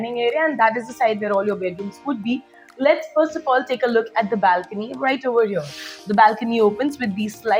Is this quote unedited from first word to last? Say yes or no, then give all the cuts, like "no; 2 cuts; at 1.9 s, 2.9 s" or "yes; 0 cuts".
yes; 0 cuts